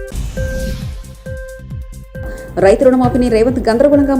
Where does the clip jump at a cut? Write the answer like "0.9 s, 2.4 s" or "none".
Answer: 2.2 s